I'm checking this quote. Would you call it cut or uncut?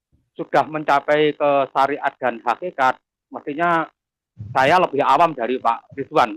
uncut